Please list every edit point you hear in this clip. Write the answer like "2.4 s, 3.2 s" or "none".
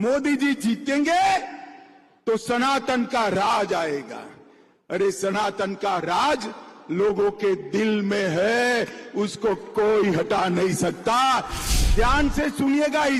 11.6 s